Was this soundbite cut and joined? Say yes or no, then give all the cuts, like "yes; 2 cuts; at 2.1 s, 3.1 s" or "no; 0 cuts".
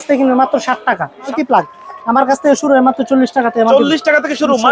yes; 1 cut; at 1.3 s